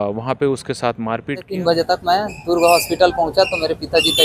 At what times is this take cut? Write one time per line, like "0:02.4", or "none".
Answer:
0:01.5